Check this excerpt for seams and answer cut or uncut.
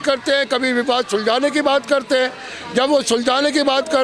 uncut